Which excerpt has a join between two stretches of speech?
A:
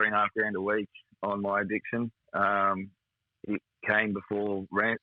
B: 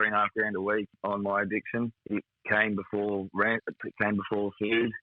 B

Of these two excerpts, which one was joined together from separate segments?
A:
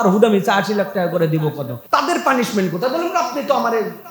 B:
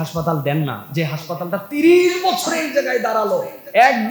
A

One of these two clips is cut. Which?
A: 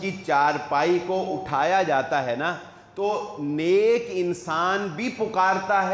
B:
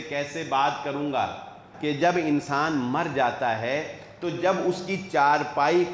B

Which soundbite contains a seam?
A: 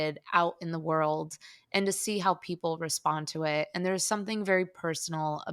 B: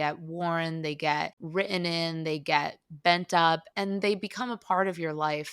B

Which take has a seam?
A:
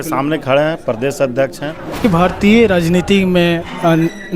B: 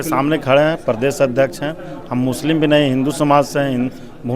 A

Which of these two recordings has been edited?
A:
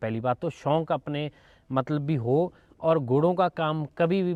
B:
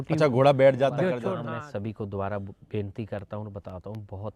B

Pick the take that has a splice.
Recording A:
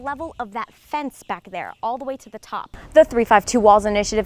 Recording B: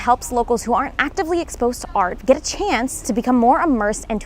A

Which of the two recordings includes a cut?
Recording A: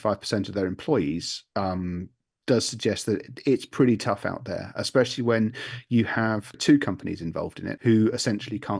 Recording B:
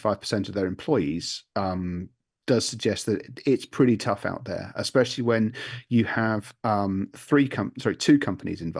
A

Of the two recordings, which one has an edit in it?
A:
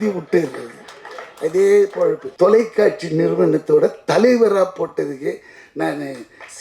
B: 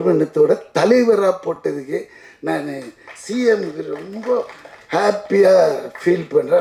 A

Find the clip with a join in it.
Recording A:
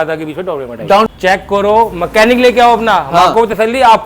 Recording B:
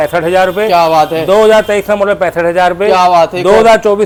A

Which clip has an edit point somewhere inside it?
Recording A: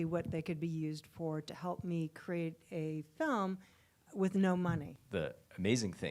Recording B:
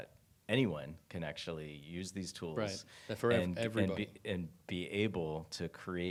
A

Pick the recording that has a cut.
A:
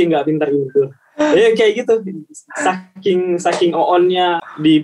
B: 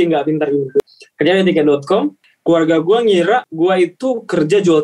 B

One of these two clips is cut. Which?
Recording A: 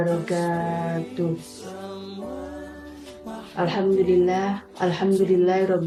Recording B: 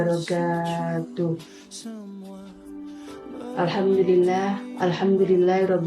B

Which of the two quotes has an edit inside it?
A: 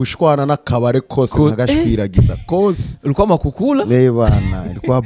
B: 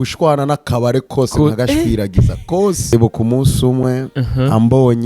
B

